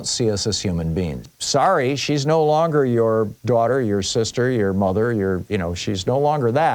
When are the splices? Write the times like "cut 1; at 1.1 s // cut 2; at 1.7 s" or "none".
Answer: cut 1; at 1.3 s